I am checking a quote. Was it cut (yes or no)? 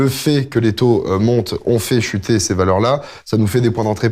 no